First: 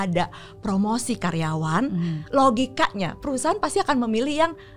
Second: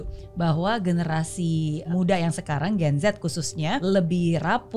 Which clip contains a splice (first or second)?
second